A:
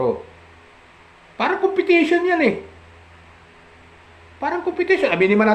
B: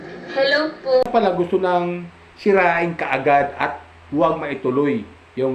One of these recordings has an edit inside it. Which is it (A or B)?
B